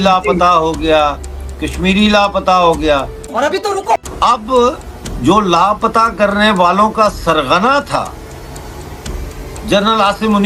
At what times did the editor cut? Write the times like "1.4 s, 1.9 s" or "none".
none